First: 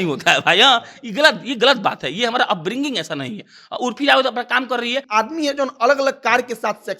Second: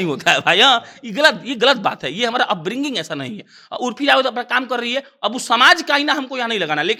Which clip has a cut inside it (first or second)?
first